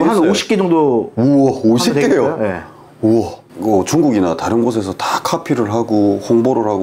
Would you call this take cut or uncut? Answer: cut